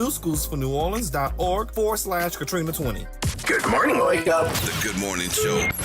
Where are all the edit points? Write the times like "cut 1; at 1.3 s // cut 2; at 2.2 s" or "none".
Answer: cut 1; at 3.1 s